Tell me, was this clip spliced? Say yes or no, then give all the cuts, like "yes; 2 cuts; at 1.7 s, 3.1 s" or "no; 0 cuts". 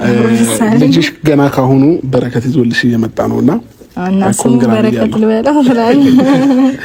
no; 0 cuts